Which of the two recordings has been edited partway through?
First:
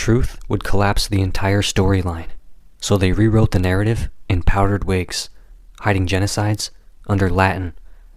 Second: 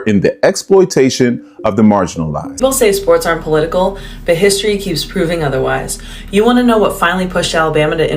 second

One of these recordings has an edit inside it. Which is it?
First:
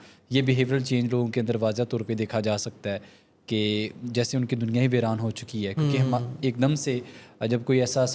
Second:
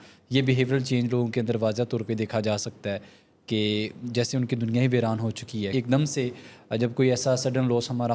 second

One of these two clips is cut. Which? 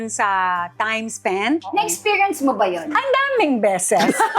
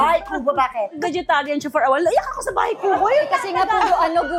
first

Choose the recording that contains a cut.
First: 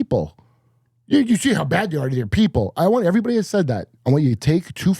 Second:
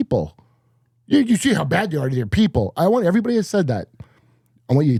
first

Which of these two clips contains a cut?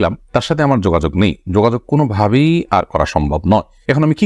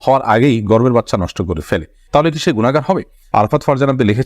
second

